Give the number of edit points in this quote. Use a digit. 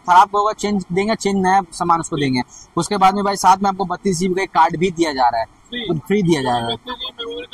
0